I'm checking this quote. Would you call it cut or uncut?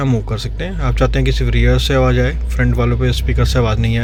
uncut